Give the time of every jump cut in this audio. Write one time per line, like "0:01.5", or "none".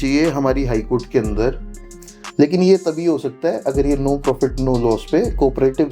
0:01.7